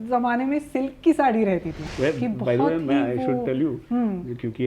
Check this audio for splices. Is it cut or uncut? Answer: cut